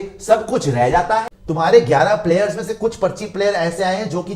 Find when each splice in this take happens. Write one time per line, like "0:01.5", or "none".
0:01.4